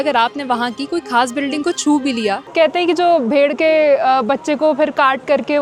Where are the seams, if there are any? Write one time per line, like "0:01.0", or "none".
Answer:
0:02.5